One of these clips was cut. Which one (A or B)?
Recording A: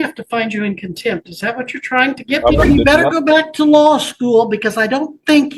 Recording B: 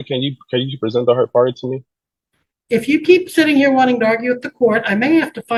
A